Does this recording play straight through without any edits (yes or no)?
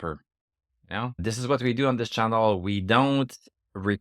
no